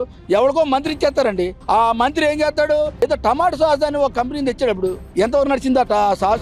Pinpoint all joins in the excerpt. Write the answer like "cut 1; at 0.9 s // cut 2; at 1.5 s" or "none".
cut 1; at 5.1 s